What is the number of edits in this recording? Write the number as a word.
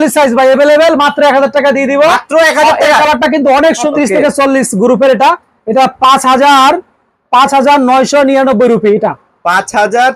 zero